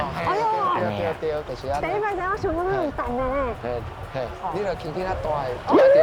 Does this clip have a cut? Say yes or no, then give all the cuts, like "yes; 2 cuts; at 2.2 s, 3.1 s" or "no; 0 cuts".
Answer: no; 0 cuts